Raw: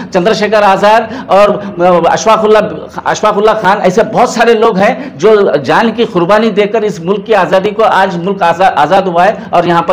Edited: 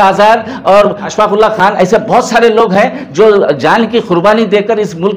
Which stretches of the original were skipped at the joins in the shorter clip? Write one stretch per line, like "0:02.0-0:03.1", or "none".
0:01.7-0:03.1

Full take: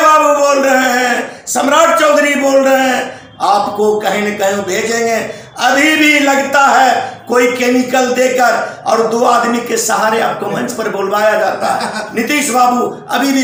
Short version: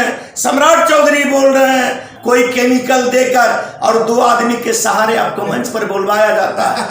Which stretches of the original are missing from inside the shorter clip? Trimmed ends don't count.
0:03.2-0:07.2

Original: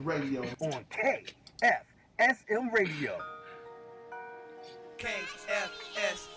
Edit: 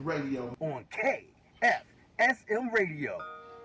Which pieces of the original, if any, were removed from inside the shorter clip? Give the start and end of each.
none

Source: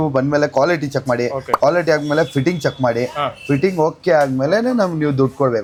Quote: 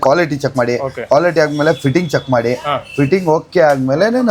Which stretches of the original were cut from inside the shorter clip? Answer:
none

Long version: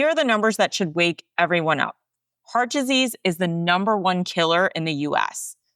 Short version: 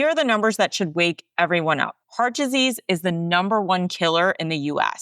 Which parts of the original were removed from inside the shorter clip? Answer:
0:02.0-0:02.3

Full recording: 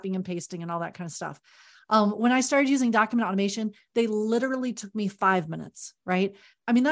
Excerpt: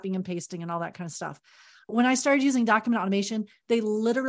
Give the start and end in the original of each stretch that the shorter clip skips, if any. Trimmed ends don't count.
0:01.9-0:02.1

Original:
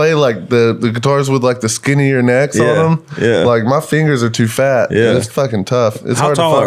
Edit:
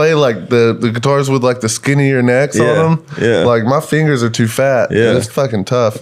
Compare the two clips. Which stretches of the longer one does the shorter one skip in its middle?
none

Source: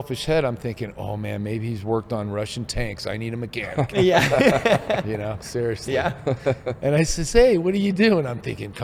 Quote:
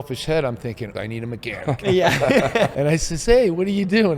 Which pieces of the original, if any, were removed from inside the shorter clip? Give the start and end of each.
0:00.9-0:03.0
0:04.8-0:06.8

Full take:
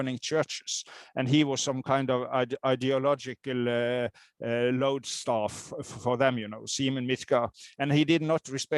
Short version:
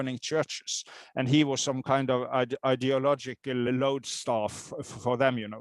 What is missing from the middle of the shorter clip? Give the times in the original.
0:03.7-0:04.7

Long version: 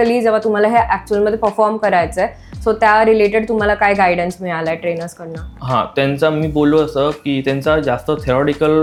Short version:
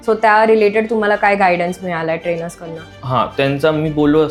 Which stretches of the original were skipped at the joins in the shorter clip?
none

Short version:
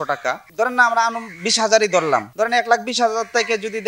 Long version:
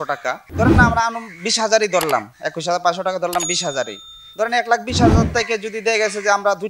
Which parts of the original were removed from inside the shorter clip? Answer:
0:02.3-0:04.3

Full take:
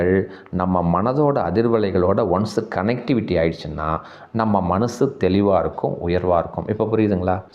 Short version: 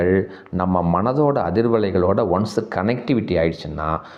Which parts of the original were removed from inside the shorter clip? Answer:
none

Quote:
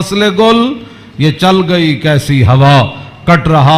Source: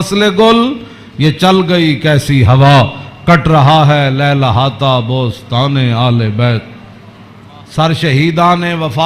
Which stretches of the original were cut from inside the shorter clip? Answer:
none

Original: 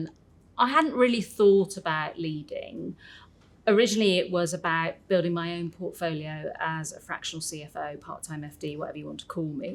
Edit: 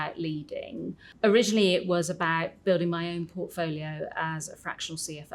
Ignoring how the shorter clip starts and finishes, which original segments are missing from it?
0:03.0-0:03.4

